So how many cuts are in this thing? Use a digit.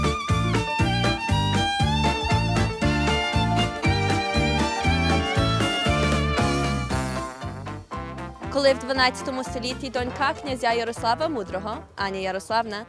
0